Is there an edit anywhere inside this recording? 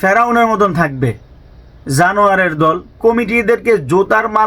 yes; 1 cut; at 3.0 s

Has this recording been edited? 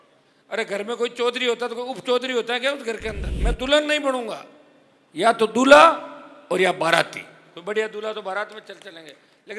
yes; 1 cut; at 3.3 s

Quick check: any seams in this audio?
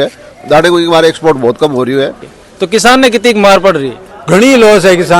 yes; 1 cut; at 2.2 s

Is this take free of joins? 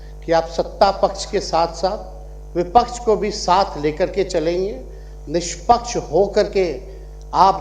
yes; 0 cuts

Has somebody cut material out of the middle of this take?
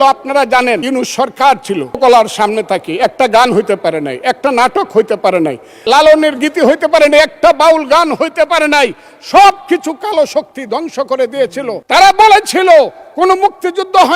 yes; 4 cuts; at 0.8 s, 2.0 s, 5.8 s, 11.8 s

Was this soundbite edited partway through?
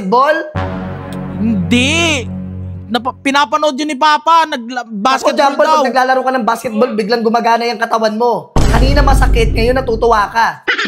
no; 0 cuts

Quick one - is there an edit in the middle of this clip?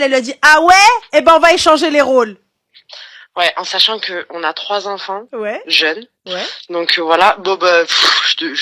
no; 0 cuts

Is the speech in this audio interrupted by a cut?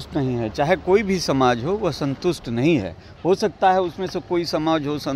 no; 0 cuts

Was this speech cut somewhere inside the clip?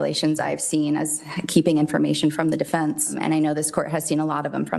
yes; 1 cut; at 3.1 s

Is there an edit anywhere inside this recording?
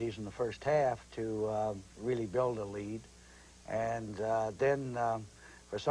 no; 0 cuts

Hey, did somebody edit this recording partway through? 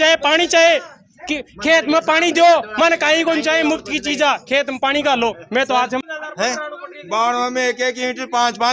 yes; 1 cut; at 6.0 s

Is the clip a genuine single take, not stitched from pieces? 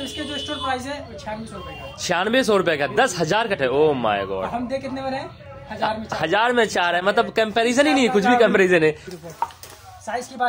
no; 2 cuts; at 3.6 s, 9.1 s

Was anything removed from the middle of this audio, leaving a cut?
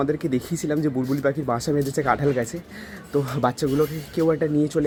no; 0 cuts

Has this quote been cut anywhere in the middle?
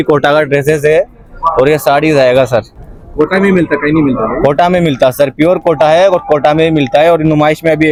no; 0 cuts

